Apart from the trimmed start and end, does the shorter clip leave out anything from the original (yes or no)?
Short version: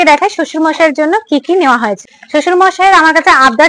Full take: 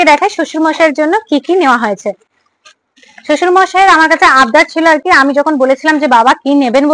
yes